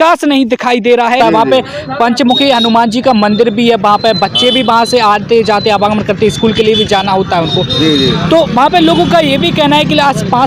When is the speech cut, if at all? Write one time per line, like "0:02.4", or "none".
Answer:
0:01.2